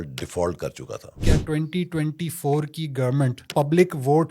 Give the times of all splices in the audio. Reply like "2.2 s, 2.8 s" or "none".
1.2 s, 3.4 s